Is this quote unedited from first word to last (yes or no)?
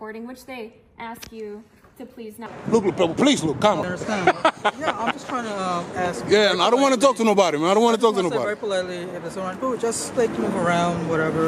no